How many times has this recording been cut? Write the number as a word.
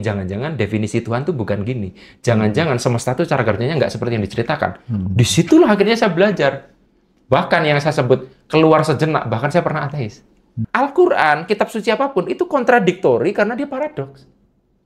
one